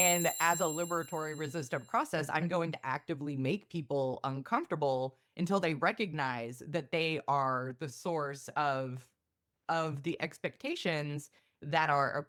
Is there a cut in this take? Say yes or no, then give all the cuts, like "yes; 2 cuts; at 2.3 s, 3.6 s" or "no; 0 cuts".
no; 0 cuts